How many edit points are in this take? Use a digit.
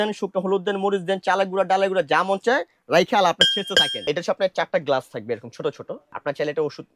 2